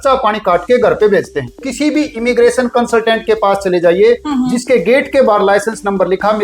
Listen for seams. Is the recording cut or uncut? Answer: cut